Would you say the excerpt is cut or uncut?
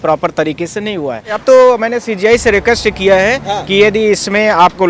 cut